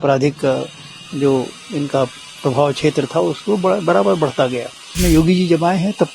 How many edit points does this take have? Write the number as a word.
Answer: one